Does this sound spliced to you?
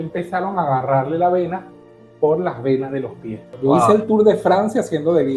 yes; 1 cut; at 3.6 s

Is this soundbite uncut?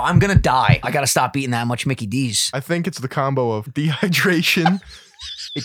no; 3 cuts; at 0.8 s, 2.4 s, 3.7 s

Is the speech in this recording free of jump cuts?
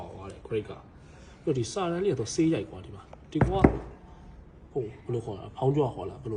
yes; 0 cuts

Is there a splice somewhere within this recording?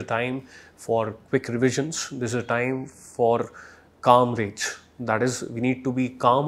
no; 0 cuts

